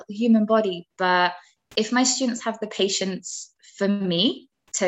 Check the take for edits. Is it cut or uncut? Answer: uncut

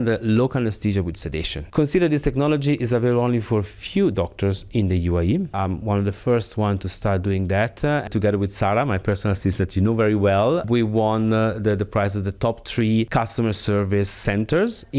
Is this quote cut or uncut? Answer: cut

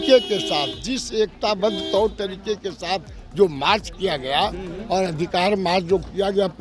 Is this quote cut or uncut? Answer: uncut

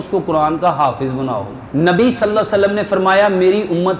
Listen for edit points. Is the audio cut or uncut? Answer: cut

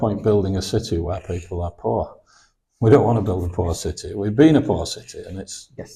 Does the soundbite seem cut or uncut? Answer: uncut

